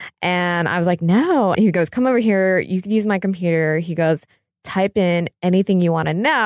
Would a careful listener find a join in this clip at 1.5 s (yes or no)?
yes